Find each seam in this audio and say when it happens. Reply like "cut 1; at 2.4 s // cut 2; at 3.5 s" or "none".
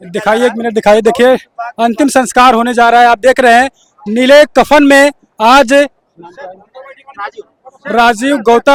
none